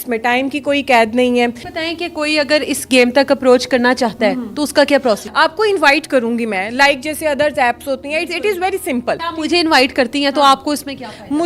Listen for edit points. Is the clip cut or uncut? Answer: cut